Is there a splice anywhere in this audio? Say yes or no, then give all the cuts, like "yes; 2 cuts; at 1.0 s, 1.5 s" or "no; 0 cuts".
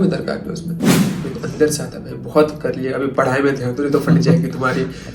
yes; 1 cut; at 1.0 s